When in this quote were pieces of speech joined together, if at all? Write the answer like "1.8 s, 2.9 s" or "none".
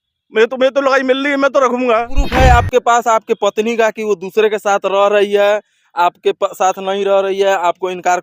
2.2 s